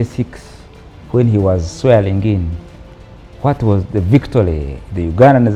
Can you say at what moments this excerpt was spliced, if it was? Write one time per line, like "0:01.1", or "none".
none